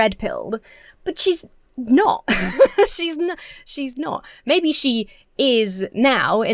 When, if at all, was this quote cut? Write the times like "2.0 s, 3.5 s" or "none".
none